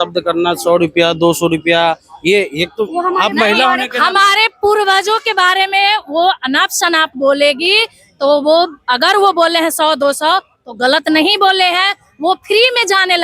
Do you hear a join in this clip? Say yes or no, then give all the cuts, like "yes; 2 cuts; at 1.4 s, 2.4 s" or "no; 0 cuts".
no; 0 cuts